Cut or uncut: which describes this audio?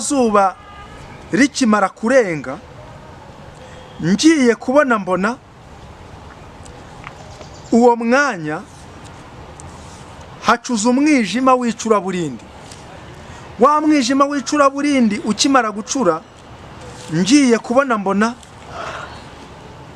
uncut